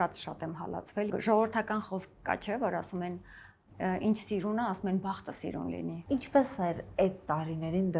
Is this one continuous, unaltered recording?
no; 2 cuts; at 1.1 s, 6.0 s

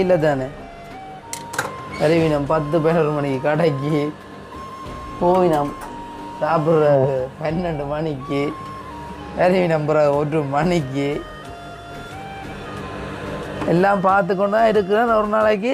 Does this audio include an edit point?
no; 0 cuts

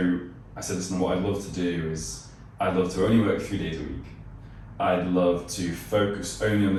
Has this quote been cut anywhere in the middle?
no; 0 cuts

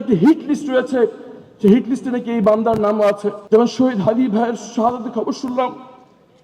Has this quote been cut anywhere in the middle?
yes; 1 cut; at 3.3 s

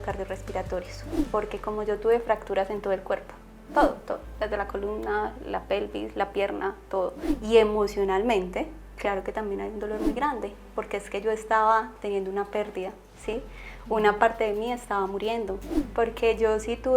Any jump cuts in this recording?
yes; 3 cuts; at 1.1 s, 7.3 s, 15.7 s

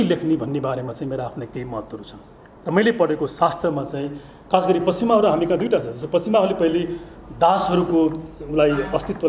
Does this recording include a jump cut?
no; 0 cuts

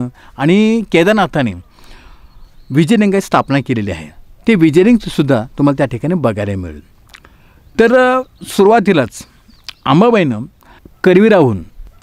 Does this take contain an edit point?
no; 0 cuts

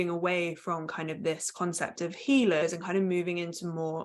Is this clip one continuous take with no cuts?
no; 1 cut; at 2.6 s

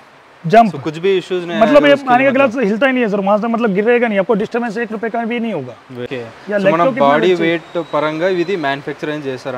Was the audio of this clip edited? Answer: yes; 1 cut; at 6.1 s

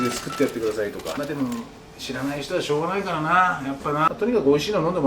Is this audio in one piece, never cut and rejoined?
no; 2 cuts; at 1.1 s, 4.1 s

